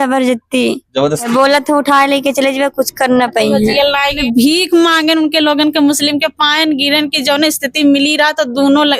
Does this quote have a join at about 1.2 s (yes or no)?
yes